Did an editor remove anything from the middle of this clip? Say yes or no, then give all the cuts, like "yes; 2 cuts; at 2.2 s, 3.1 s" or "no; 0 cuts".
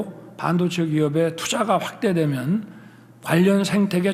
no; 0 cuts